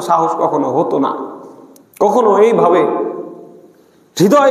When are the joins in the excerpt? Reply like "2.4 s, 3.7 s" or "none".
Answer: none